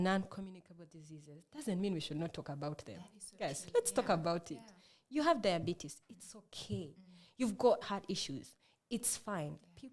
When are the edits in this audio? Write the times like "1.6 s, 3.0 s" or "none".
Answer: 7.8 s